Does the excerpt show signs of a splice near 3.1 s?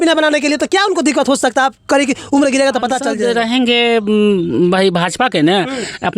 yes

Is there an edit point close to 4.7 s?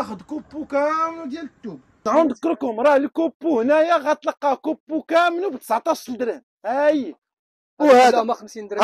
no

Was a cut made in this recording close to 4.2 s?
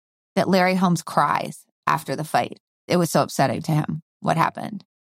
no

